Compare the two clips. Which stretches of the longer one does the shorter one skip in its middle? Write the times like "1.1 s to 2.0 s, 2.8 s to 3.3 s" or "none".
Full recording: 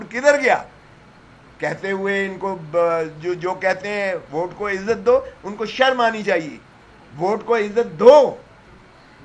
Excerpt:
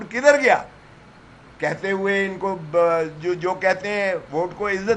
none